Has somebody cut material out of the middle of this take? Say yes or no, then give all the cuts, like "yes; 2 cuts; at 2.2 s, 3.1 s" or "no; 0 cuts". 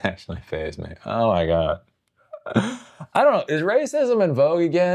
no; 0 cuts